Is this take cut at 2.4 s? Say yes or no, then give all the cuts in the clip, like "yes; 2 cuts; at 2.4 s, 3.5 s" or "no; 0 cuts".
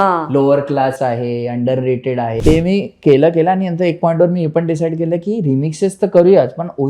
yes; 1 cut; at 2.4 s